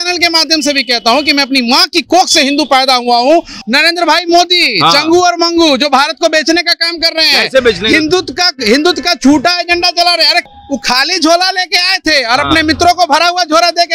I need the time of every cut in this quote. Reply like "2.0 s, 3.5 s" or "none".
3.5 s, 10.5 s